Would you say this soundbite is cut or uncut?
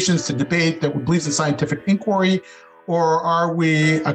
uncut